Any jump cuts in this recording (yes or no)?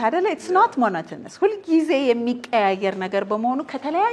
no